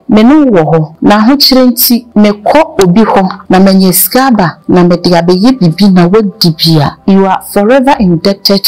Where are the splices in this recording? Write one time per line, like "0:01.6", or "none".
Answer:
0:00.9
0:02.1
0:03.4
0:04.6
0:06.9